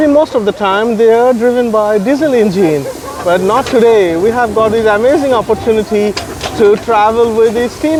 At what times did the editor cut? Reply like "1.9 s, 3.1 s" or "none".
none